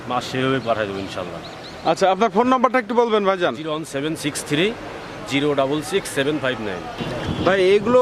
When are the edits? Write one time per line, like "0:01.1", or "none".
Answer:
0:07.0